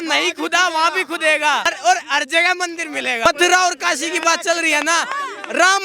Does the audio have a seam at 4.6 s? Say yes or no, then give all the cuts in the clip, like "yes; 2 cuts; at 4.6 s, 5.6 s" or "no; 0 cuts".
no; 2 cuts; at 1.7 s, 3.2 s